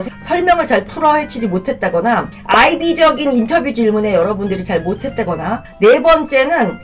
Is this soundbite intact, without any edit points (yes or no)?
yes